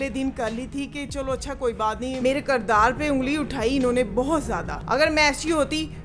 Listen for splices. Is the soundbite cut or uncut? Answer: cut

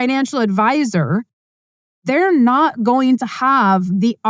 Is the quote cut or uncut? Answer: uncut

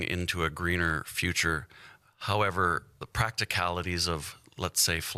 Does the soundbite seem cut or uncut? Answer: uncut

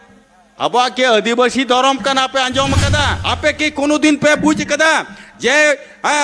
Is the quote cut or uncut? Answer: cut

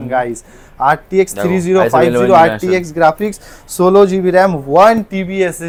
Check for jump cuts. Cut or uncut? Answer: uncut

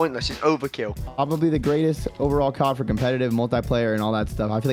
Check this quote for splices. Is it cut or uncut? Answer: cut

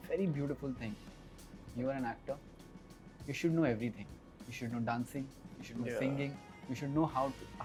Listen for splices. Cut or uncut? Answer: uncut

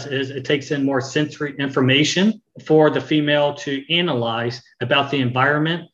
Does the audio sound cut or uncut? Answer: cut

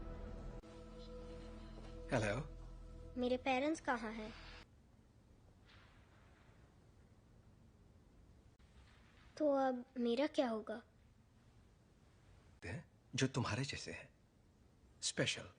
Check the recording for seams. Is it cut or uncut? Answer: cut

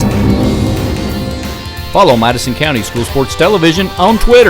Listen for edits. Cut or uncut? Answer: cut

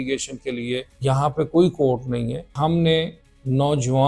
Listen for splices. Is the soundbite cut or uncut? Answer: cut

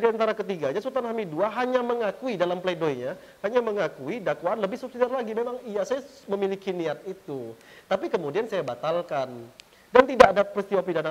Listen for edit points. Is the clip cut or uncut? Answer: uncut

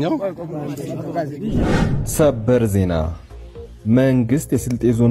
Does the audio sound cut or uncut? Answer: cut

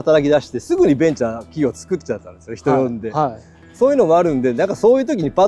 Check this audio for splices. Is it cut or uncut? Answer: uncut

